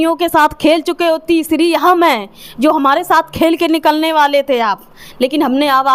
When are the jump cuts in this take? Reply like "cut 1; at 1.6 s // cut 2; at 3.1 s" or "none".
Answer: none